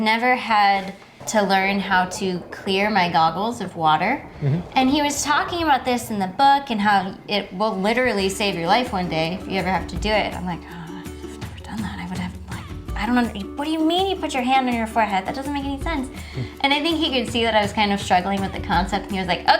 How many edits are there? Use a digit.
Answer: 1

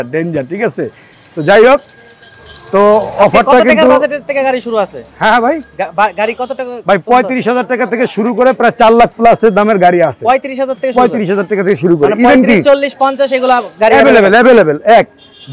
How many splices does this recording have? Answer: 0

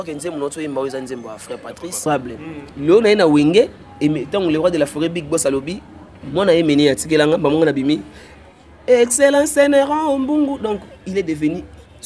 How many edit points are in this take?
1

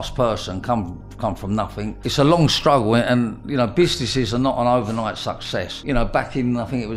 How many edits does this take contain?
2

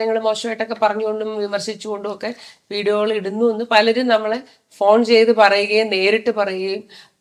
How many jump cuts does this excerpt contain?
0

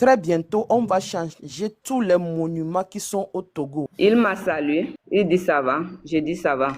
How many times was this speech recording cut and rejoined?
2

